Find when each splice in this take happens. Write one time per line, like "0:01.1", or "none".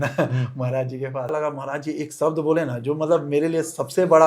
0:01.3